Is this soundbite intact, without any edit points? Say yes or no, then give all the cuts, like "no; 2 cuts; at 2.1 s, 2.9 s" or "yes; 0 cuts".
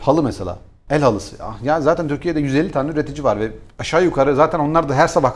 yes; 0 cuts